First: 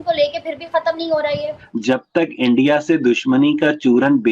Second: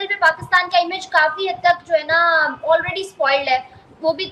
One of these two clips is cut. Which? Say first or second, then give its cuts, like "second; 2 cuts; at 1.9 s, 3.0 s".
first; 1 cut; at 1.6 s